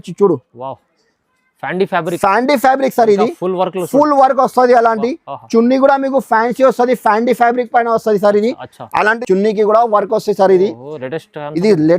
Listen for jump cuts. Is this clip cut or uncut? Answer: cut